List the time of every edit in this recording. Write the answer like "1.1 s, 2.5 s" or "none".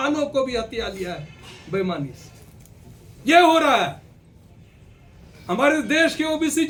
none